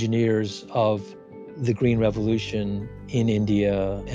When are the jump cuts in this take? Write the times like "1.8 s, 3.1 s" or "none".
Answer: none